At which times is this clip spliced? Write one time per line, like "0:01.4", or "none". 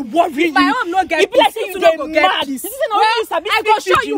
none